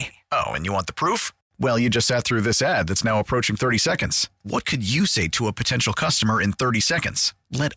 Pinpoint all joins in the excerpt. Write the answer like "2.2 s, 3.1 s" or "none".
none

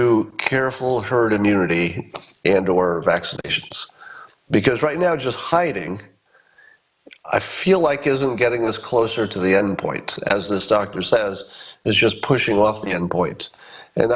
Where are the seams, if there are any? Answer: none

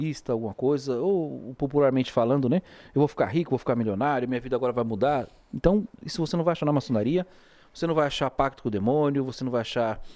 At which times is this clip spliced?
none

